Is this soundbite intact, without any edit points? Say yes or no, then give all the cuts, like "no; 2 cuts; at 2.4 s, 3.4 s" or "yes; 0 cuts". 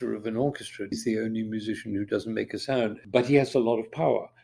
no; 2 cuts; at 0.9 s, 3.0 s